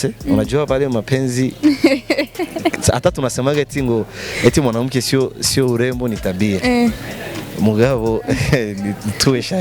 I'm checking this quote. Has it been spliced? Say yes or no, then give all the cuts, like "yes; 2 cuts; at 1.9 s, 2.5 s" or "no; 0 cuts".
no; 0 cuts